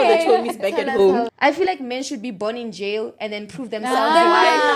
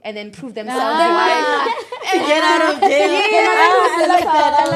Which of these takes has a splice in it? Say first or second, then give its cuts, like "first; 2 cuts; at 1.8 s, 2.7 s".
first; 1 cut; at 1.3 s